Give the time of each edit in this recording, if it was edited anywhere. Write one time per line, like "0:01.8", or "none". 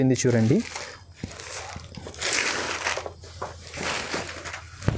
none